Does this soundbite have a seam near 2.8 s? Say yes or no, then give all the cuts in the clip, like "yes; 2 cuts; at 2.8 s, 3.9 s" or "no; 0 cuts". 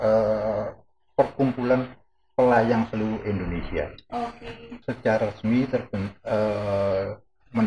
no; 1 cut; at 4.7 s